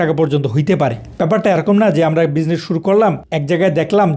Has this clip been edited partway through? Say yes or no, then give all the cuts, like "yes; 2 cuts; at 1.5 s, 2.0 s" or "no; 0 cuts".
yes; 1 cut; at 1.0 s